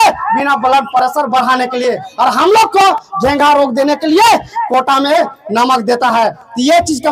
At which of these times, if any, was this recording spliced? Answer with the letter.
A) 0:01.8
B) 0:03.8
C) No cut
C